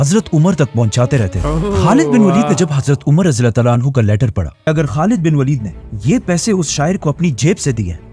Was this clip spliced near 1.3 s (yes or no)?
no